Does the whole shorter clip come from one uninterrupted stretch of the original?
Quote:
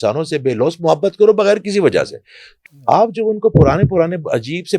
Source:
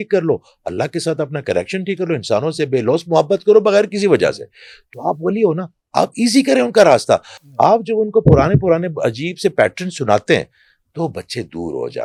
no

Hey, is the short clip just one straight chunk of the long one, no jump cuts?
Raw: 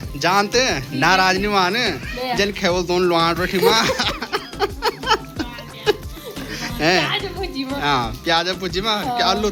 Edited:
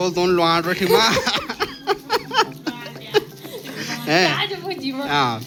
yes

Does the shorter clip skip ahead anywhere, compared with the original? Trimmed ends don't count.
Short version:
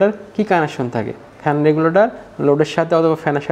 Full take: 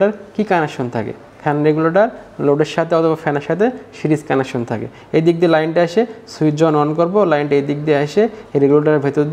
no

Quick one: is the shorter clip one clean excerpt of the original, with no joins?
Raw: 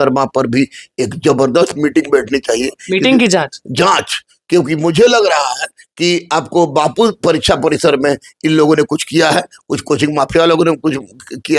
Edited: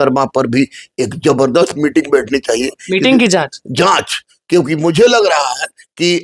yes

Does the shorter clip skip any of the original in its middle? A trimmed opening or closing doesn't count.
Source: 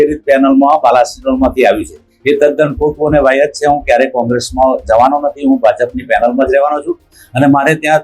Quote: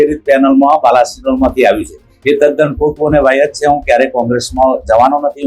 no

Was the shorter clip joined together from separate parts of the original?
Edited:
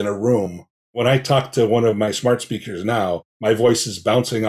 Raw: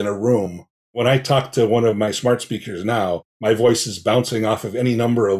no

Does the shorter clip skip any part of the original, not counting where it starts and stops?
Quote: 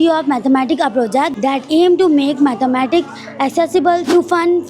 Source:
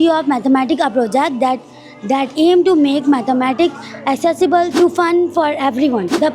yes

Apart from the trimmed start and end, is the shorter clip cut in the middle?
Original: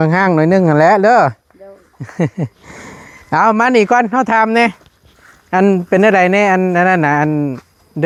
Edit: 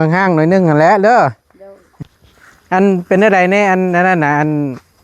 yes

